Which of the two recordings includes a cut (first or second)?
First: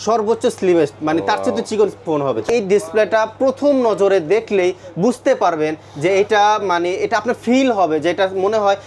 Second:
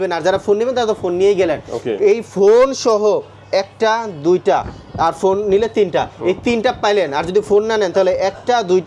first